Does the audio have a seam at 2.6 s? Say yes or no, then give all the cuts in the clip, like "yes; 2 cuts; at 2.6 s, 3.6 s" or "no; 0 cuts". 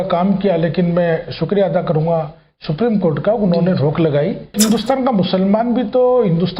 no; 1 cut; at 4.5 s